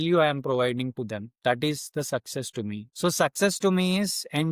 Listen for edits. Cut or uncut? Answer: cut